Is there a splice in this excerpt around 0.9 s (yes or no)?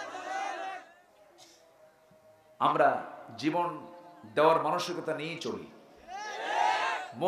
yes